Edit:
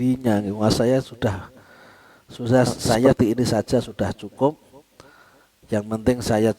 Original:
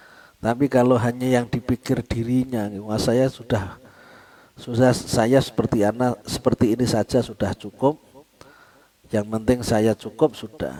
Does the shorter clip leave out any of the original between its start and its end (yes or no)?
yes